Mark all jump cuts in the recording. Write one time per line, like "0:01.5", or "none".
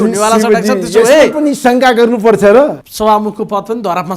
0:02.8